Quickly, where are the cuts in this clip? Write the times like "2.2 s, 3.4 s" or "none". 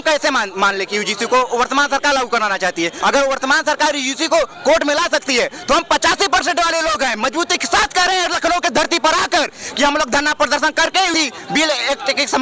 2.9 s, 11.1 s